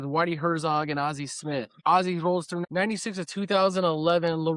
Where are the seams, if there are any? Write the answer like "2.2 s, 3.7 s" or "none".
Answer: 1.7 s, 2.6 s